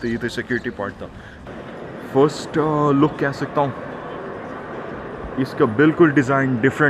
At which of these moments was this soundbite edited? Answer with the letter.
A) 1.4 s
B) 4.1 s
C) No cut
A